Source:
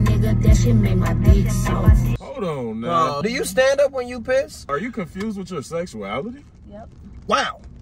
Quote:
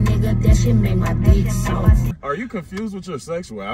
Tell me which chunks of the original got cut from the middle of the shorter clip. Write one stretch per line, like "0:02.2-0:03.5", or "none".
0:02.1-0:04.6